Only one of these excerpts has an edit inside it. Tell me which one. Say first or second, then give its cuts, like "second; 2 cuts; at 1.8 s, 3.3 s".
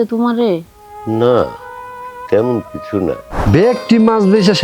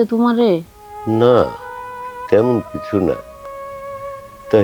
first; 1 cut; at 3.3 s